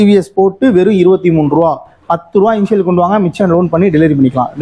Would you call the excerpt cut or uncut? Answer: uncut